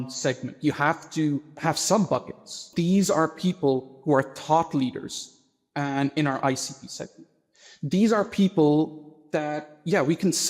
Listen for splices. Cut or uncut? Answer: cut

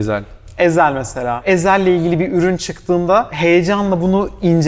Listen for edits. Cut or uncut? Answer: cut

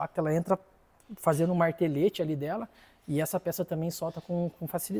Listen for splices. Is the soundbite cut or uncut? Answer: uncut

